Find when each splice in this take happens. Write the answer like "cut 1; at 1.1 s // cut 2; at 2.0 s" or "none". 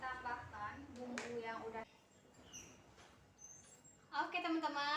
cut 1; at 1.9 s